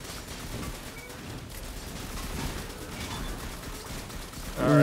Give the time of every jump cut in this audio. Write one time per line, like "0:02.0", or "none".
none